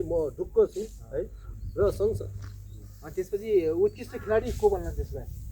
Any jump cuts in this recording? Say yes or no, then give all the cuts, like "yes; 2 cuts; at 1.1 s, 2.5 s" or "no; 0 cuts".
no; 0 cuts